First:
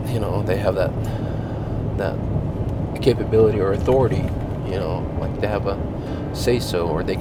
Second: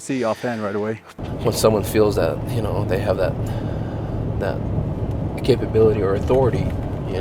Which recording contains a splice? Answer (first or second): second